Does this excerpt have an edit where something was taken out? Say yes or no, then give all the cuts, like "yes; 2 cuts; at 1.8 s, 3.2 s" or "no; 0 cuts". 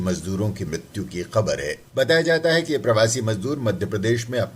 yes; 1 cut; at 1.8 s